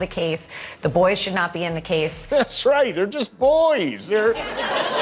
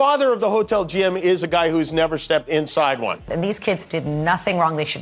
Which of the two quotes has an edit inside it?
second; 1 cut; at 3.3 s

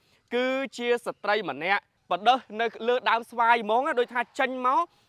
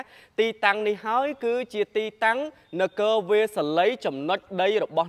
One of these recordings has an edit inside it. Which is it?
first; 1 cut; at 1.9 s

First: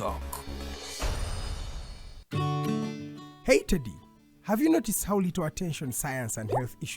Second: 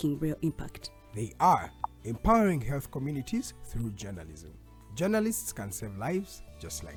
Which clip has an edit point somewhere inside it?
first; 1 cut; at 2.2 s

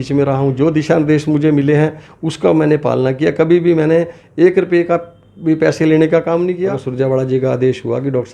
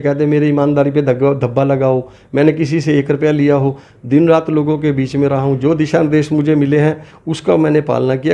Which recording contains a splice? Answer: first; 1 cut; at 6.7 s

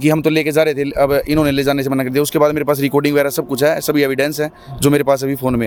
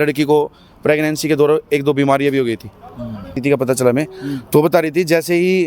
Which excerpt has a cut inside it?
second; 1 cut; at 3.3 s

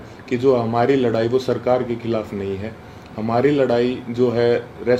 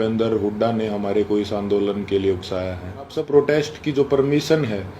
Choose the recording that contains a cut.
second; 1 cut; at 3.2 s

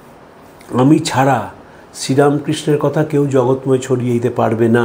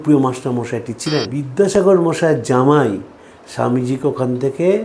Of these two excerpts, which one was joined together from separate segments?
second; 1 cut; at 1.4 s

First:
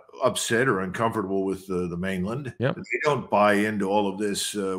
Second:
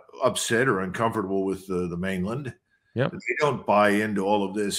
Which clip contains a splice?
first; 1 cut; at 2.5 s

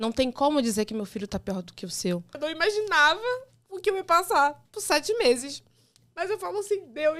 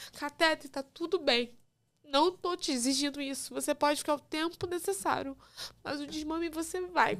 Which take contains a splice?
first; 1 cut; at 2.3 s

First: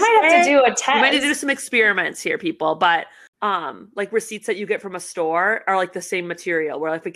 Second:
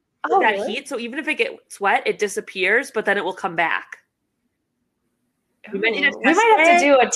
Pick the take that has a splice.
first; 1 cut; at 3.2 s

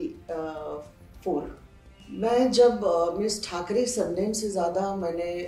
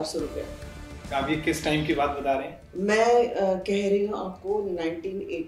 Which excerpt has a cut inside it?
first; 1 cut; at 1.6 s

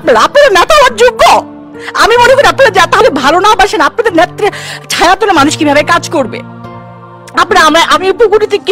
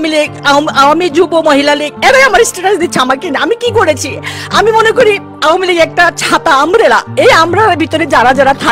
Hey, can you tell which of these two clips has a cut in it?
first; 1 cut; at 3.0 s

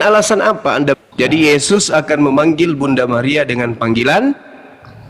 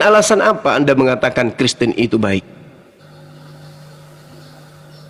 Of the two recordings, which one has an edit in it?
first; 1 cut; at 1.0 s

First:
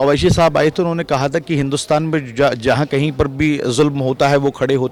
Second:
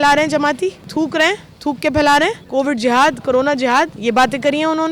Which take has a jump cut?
second; 3 cuts; at 0.8 s, 2.4 s, 4.0 s

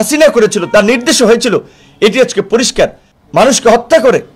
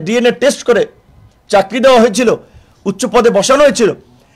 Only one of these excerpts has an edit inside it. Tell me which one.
first; 1 cut; at 3.1 s

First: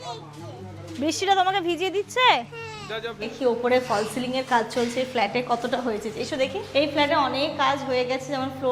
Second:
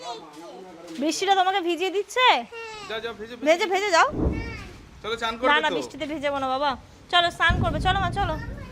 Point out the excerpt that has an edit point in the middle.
first; 2 cuts; at 3.3 s, 6.6 s

